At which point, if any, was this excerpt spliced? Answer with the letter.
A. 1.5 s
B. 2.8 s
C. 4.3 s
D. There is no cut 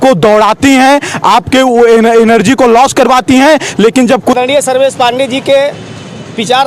C